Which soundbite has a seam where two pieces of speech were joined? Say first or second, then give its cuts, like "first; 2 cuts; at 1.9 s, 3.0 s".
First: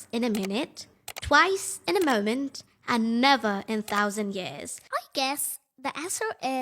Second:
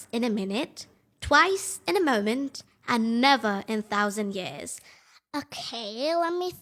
first; 1 cut; at 4.7 s